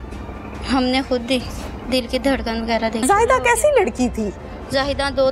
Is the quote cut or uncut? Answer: cut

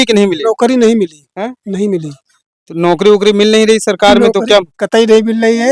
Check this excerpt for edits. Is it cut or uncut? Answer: uncut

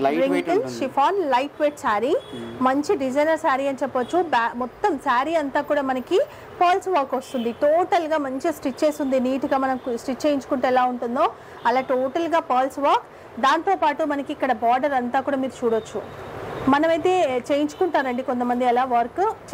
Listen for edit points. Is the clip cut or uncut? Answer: uncut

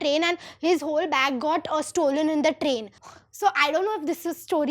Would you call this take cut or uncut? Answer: cut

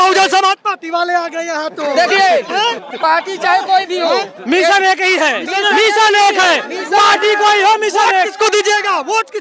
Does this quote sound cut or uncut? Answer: uncut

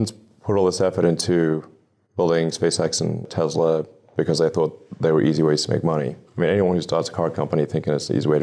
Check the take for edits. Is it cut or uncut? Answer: cut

